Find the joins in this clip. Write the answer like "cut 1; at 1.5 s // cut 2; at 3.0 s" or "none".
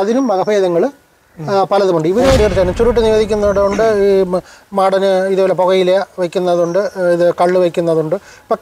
cut 1; at 2.4 s